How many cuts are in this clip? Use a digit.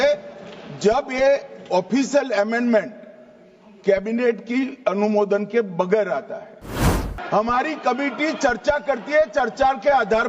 1